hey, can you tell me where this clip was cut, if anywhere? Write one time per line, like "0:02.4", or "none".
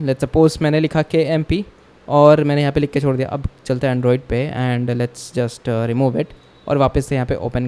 none

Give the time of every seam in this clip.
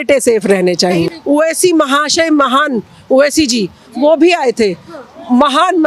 0:01.1

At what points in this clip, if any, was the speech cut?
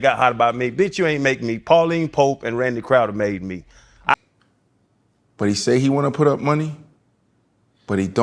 0:04.1

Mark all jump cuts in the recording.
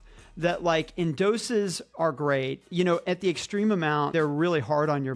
0:01.8
0:04.1

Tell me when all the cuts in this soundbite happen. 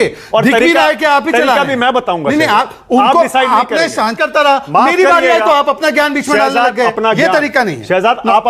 0:04.2

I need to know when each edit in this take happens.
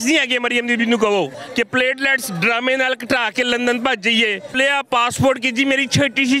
0:01.4
0:04.6

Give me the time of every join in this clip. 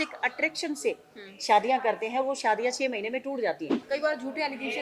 0:03.8

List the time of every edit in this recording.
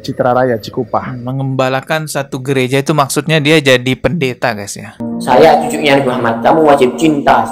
0:05.0

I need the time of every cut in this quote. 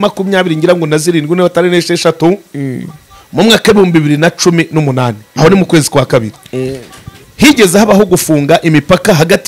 none

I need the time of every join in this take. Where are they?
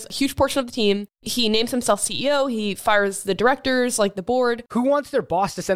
0:04.6

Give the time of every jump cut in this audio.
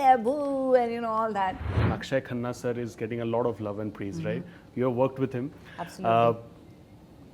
0:01.7

